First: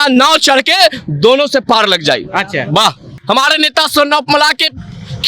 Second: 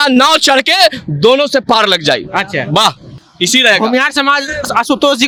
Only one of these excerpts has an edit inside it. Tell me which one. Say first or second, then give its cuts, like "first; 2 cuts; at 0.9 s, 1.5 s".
first; 1 cut; at 3.1 s